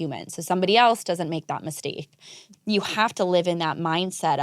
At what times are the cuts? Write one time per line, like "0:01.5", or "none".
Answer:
0:02.4